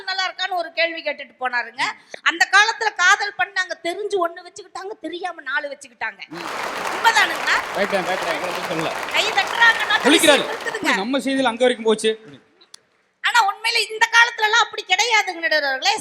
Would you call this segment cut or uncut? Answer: uncut